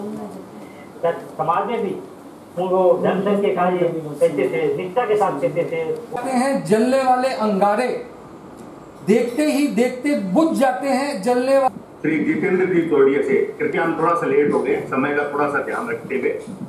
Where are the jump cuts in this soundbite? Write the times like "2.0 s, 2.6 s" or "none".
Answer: 6.1 s, 11.7 s